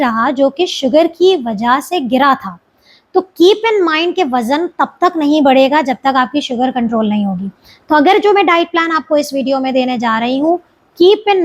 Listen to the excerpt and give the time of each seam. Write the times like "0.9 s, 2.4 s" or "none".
none